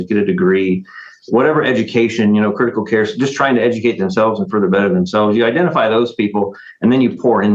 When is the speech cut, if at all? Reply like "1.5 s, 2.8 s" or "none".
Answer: none